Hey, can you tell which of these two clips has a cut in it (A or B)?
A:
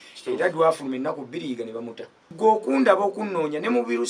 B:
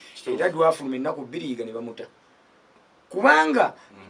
A